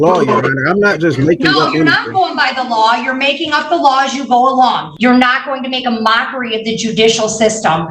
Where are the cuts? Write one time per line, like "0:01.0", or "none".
0:04.9